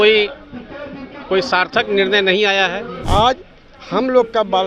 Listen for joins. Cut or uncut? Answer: cut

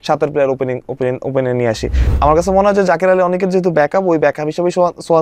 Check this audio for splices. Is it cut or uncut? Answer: cut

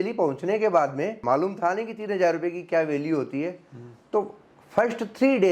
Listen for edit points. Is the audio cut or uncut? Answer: cut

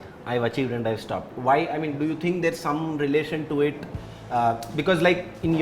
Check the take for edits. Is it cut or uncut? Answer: uncut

